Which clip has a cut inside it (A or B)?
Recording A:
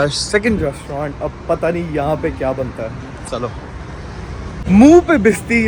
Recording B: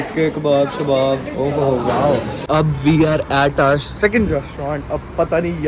B